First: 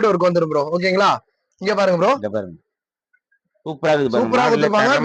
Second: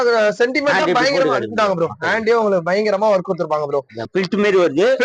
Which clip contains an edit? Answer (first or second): second